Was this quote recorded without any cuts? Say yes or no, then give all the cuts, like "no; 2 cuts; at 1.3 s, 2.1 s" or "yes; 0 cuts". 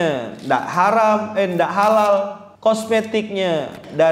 no; 1 cut; at 2.4 s